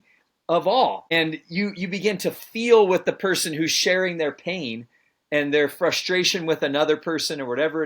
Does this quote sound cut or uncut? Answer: cut